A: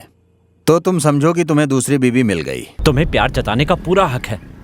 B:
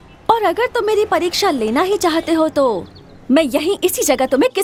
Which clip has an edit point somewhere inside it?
A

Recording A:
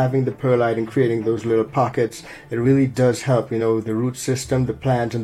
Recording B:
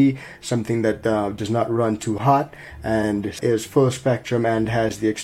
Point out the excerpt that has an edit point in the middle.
B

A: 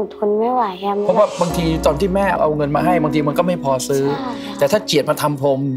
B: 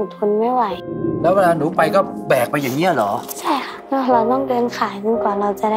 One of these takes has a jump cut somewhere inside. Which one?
B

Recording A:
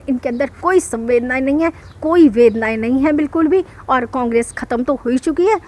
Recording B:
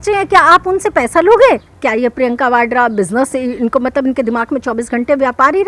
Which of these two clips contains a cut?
B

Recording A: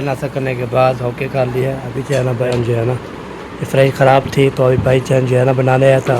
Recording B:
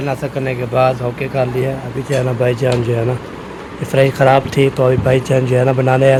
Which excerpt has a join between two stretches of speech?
A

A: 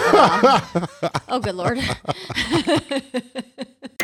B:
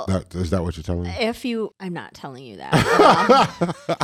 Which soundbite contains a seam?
B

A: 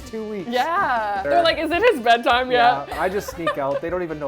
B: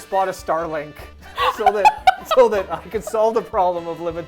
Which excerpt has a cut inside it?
A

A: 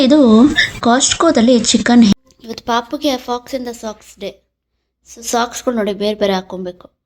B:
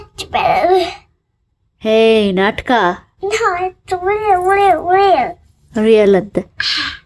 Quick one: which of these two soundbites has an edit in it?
A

